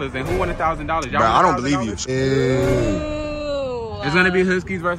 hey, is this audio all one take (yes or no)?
no